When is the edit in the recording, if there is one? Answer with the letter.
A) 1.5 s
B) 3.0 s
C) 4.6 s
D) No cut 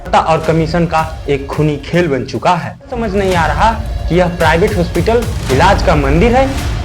B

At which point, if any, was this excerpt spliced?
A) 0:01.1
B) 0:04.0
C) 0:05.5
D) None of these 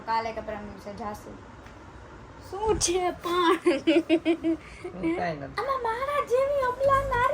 C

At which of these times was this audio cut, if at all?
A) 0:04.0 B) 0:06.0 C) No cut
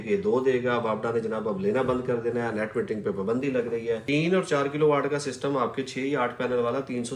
A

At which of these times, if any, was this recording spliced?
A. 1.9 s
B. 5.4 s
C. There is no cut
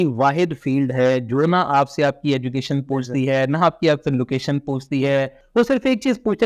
B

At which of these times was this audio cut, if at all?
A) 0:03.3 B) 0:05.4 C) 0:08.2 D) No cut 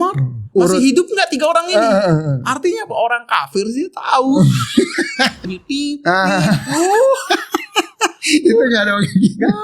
B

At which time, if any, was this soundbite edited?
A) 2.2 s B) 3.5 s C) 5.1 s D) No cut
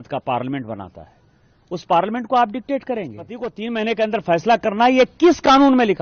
B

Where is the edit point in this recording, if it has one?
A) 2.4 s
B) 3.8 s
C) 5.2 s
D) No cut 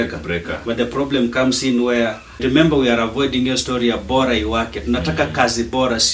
A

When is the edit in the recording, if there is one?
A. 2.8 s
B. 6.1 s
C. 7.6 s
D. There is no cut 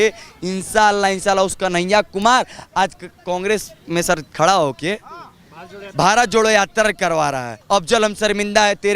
C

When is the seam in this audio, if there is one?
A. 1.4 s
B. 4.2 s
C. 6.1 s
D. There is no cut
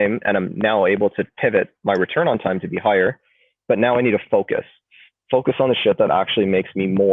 D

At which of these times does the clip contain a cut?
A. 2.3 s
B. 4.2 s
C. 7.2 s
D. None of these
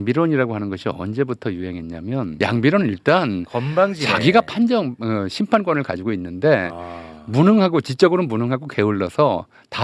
A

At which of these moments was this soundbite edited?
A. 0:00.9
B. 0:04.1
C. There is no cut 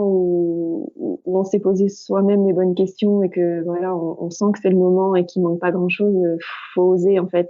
C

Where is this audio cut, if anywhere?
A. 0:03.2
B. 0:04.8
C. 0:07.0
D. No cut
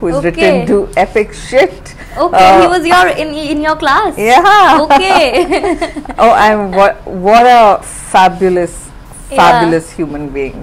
D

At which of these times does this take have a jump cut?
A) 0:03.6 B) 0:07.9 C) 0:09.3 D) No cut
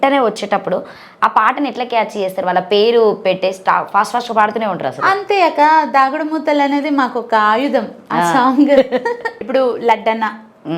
C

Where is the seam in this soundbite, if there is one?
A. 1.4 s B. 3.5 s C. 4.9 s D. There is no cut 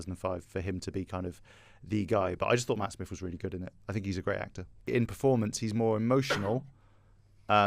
C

